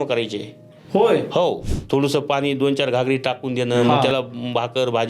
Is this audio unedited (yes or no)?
no